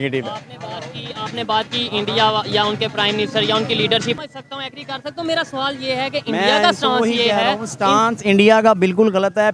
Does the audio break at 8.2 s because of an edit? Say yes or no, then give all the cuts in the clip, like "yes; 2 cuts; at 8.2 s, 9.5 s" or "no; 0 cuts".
no; 1 cut; at 4.2 s